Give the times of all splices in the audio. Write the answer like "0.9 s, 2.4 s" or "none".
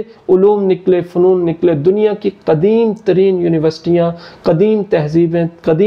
none